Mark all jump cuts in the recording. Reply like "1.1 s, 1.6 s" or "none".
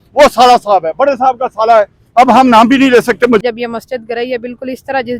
3.4 s